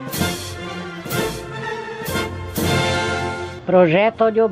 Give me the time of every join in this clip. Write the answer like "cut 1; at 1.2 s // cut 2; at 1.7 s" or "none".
cut 1; at 3.5 s